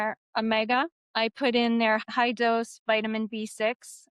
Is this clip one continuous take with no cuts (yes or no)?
no